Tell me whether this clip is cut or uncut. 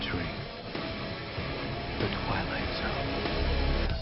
cut